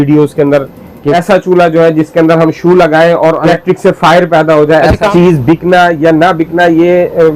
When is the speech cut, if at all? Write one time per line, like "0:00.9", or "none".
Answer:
0:01.0
0:03.5
0:05.1